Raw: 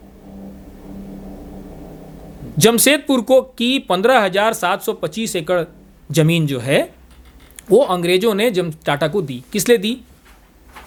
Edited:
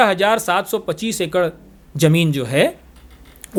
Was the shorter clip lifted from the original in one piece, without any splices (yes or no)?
yes